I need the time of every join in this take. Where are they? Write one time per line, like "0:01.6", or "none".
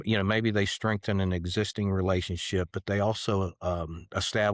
none